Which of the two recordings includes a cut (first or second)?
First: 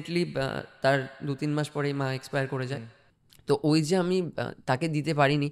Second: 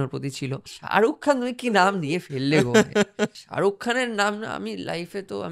second